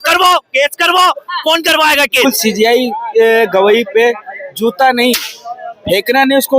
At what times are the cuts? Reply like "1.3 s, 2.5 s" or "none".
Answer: 2.2 s